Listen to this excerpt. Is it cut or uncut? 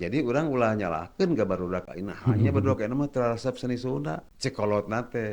cut